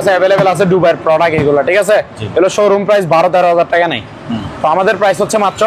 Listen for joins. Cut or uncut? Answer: uncut